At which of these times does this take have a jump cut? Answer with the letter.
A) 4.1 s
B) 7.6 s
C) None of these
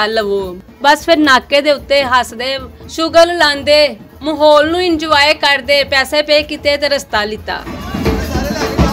B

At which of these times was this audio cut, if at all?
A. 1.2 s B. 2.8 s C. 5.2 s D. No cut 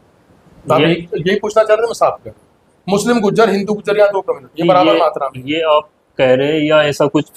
D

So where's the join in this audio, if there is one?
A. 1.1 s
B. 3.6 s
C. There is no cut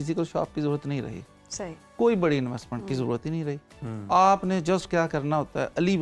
C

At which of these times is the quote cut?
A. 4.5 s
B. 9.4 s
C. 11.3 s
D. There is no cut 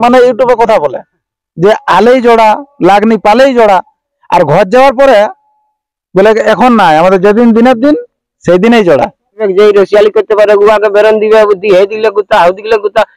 B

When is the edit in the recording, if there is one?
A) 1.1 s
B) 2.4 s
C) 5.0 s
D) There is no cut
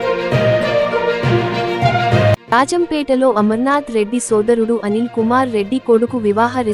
B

